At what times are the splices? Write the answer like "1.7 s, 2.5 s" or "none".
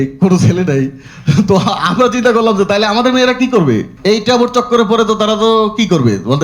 3.9 s